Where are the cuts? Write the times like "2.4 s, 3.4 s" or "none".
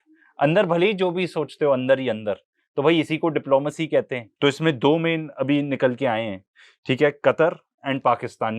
4.2 s